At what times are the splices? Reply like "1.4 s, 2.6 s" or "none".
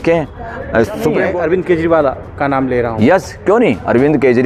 1.5 s